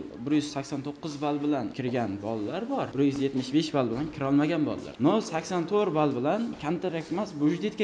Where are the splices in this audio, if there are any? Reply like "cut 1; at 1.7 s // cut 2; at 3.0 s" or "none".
cut 1; at 1.8 s // cut 2; at 2.9 s // cut 3; at 4.9 s